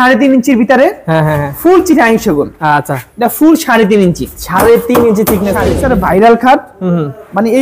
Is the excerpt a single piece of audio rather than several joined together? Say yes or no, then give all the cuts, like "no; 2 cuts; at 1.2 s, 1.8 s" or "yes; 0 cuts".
no; 1 cut; at 5.8 s